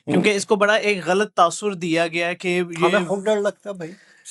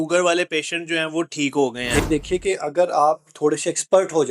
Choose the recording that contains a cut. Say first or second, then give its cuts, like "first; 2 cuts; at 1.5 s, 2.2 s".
second; 1 cut; at 2.0 s